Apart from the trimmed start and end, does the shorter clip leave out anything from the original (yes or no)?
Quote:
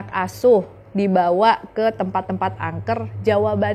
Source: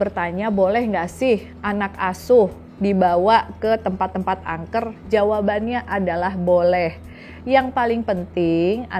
no